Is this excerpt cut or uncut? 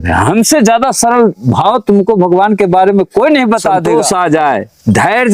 cut